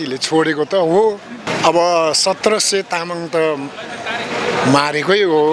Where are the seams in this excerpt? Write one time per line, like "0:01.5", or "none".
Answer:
0:01.5